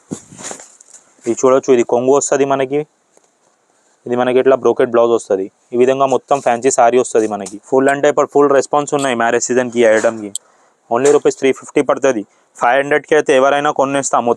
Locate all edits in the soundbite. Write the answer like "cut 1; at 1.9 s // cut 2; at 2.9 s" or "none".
cut 1; at 7.5 s